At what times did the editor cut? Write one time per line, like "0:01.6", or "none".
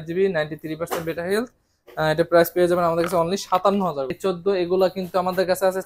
0:04.1